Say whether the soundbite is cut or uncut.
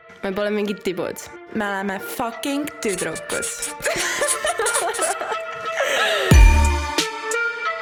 uncut